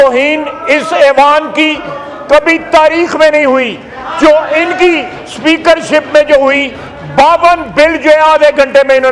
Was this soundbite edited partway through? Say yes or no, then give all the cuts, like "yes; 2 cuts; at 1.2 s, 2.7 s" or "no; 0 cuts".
no; 0 cuts